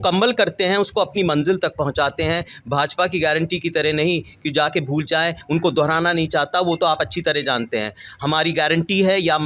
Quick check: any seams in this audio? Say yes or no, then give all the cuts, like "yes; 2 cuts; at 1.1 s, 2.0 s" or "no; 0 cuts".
no; 0 cuts